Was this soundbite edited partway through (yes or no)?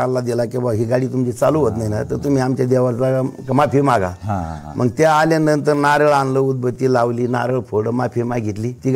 no